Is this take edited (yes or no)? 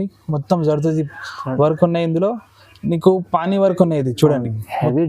no